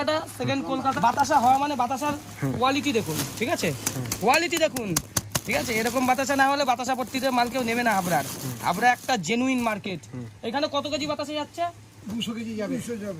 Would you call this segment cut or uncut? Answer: cut